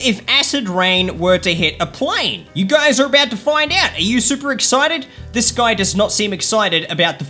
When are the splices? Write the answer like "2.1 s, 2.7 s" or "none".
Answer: none